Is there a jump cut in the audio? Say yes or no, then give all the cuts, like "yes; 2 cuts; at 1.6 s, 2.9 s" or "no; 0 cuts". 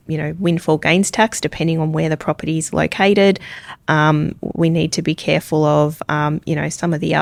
no; 0 cuts